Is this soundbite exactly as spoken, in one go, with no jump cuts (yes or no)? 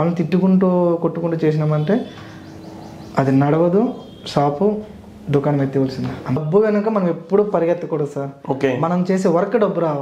no